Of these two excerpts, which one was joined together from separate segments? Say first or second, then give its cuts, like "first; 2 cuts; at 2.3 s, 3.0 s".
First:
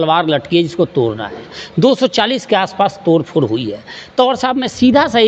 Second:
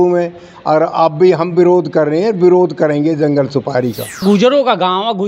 second; 1 cut; at 4.2 s